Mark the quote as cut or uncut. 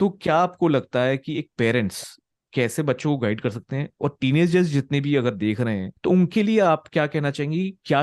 cut